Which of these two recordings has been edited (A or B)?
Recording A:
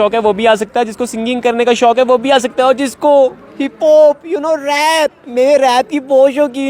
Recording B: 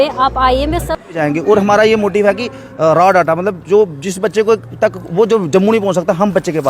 B